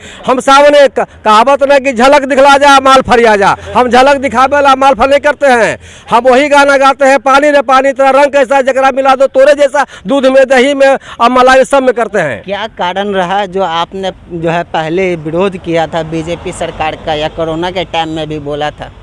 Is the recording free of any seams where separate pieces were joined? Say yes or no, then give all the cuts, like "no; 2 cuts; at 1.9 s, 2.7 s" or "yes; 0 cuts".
yes; 0 cuts